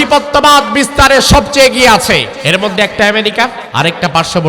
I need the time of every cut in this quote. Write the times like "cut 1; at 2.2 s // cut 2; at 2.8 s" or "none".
cut 1; at 2.3 s // cut 2; at 3.6 s